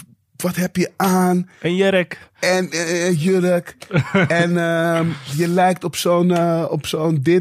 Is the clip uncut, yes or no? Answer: yes